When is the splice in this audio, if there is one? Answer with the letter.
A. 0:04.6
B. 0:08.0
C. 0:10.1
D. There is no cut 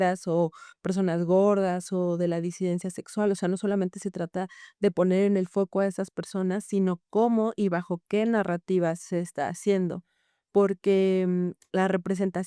D